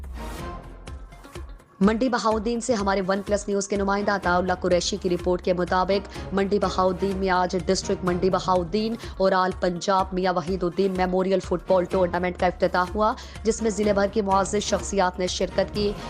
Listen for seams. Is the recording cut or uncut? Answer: cut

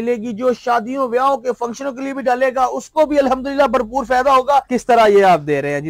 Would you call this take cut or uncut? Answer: cut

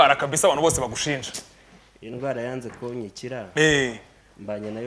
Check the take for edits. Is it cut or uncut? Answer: uncut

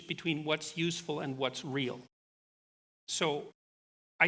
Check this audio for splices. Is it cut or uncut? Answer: uncut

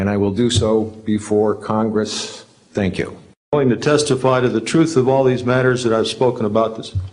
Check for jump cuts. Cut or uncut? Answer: cut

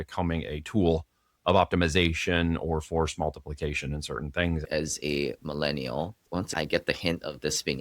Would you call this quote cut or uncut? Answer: cut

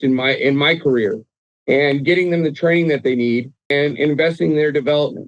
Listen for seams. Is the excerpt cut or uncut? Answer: cut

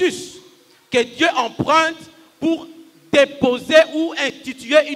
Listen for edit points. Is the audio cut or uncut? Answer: uncut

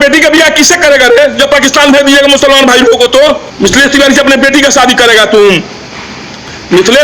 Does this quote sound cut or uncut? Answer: cut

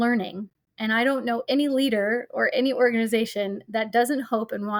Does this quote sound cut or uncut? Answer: uncut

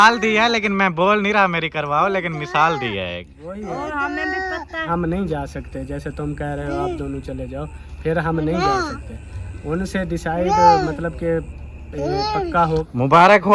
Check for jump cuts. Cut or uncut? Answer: cut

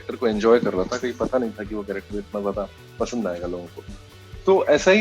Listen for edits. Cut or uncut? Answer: uncut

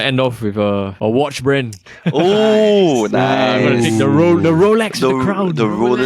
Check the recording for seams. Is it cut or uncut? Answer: cut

